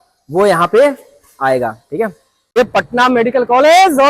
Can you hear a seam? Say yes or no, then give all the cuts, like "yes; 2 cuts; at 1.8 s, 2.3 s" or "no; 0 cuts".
no; 0 cuts